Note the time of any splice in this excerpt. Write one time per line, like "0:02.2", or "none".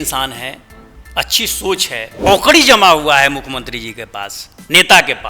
0:02.3